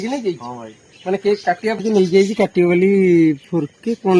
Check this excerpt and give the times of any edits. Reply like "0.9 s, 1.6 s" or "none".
1.8 s